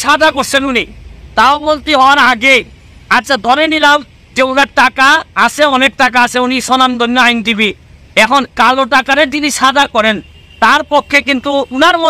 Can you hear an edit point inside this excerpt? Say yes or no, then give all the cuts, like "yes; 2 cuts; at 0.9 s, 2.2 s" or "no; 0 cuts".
no; 0 cuts